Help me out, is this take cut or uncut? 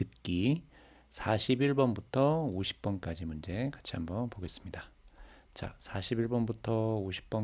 uncut